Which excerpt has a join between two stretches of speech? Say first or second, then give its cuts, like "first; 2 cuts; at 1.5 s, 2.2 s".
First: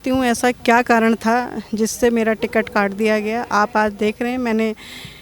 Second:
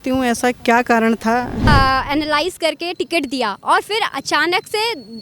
second; 1 cut; at 1.7 s